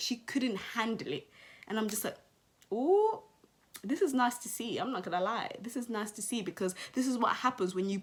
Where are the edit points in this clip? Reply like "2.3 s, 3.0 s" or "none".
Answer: none